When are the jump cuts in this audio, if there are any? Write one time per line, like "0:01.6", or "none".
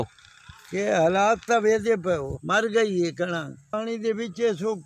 0:02.3
0:03.7